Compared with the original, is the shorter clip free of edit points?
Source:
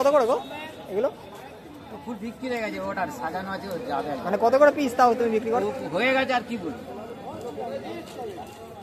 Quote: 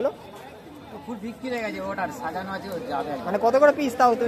yes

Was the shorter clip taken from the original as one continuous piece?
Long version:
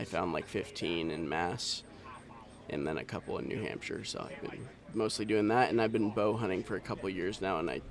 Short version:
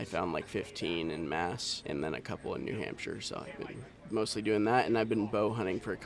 no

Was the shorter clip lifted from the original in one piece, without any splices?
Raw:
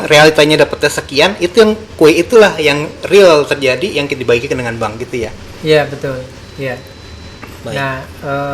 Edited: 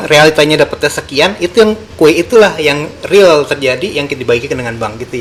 yes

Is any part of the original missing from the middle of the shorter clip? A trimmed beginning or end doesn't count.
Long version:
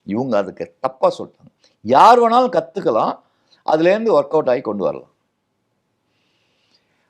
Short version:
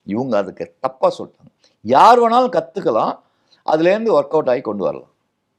no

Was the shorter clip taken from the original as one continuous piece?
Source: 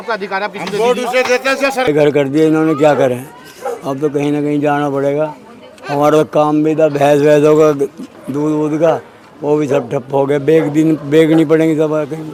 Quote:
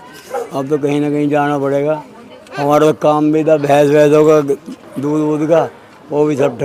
yes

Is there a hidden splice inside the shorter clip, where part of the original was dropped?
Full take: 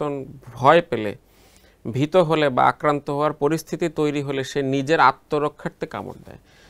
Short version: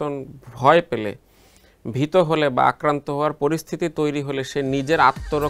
no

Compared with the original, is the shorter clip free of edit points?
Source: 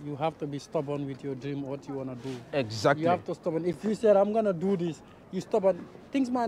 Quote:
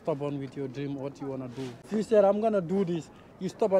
no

